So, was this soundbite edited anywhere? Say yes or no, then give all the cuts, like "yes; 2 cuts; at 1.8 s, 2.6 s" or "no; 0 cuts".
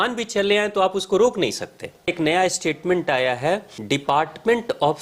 yes; 2 cuts; at 2.1 s, 3.7 s